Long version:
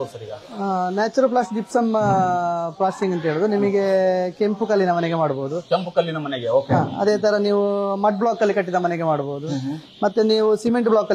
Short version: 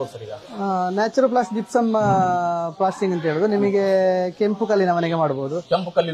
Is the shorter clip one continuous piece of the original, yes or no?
yes